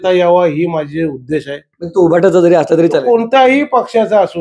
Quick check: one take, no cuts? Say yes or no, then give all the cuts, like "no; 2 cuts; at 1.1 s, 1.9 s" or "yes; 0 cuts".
yes; 0 cuts